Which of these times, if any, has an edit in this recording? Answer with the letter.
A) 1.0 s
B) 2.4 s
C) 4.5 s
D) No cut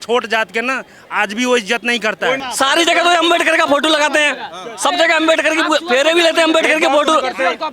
B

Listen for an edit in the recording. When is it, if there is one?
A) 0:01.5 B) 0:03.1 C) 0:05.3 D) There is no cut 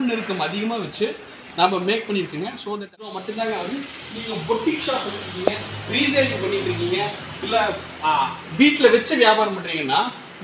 B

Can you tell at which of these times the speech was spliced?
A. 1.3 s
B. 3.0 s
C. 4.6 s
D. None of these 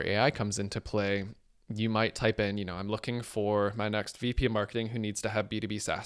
D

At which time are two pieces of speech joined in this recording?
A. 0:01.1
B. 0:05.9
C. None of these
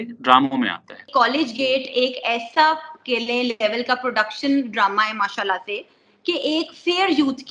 A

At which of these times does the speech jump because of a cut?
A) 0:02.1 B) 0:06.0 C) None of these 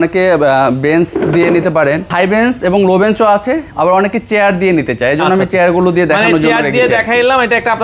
A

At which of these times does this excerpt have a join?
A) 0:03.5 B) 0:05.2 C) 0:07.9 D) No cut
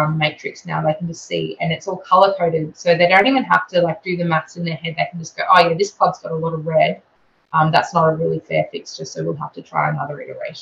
D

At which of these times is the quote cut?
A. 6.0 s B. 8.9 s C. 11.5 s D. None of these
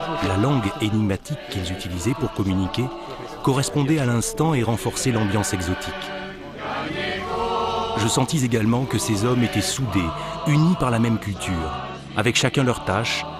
B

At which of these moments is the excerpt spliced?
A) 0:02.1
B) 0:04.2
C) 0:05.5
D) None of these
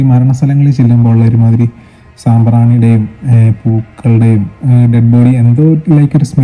D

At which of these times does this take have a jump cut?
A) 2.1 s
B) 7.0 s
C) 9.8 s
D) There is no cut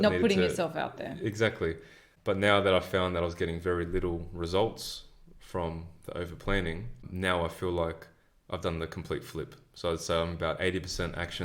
B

